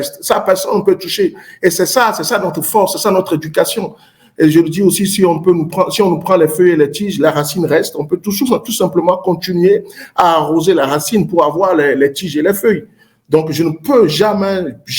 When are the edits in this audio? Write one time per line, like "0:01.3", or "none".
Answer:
none